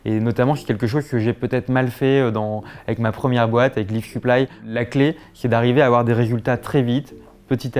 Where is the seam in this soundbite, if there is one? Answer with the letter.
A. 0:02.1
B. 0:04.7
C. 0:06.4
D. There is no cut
B